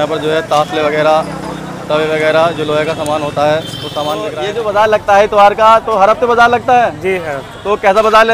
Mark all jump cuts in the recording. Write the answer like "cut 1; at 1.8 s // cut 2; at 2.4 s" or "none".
cut 1; at 4.4 s